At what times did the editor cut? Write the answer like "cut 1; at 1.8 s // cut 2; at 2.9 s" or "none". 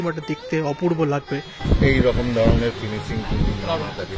cut 1; at 1.5 s